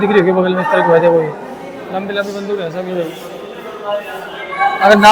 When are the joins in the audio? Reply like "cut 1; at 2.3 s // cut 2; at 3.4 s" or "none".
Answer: none